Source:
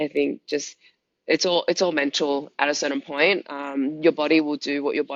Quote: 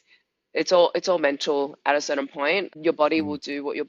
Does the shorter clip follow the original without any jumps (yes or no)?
no